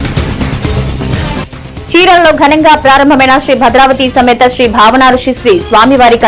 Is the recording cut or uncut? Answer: cut